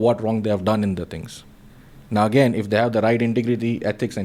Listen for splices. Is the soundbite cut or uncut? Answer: uncut